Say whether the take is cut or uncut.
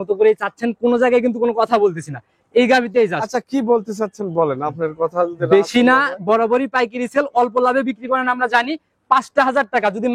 uncut